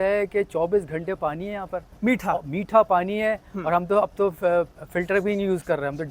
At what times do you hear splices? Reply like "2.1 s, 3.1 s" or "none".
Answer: none